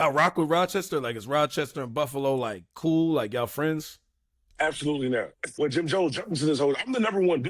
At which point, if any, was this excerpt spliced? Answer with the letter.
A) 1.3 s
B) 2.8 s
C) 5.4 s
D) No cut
C